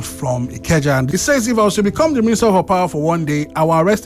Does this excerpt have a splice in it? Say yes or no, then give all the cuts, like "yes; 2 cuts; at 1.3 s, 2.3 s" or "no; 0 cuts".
yes; 1 cut; at 1.1 s